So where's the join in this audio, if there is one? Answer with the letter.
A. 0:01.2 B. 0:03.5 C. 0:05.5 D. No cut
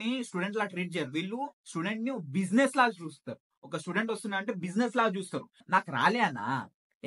C